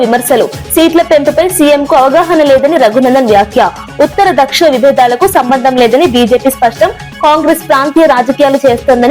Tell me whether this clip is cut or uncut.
uncut